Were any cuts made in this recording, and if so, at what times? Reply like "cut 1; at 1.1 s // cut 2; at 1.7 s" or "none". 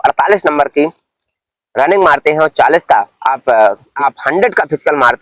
cut 1; at 3.9 s